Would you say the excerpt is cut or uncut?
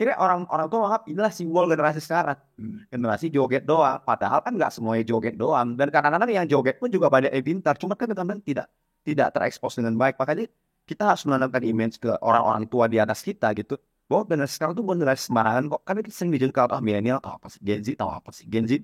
uncut